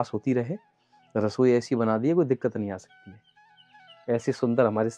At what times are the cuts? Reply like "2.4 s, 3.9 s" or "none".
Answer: none